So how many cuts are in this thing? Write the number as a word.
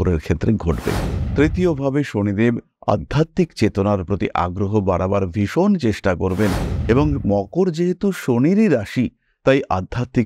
one